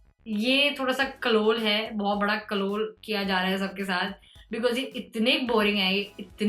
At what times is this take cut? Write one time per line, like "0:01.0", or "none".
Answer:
none